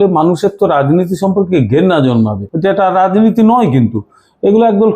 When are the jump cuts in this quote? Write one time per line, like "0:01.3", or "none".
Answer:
0:02.5